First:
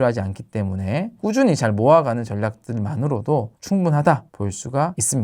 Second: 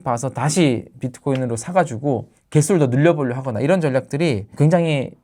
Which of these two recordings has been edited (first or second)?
first